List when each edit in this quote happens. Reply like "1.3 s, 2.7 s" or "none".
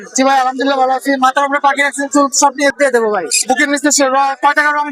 2.7 s